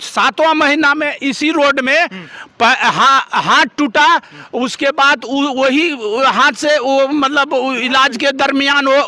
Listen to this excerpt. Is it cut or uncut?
uncut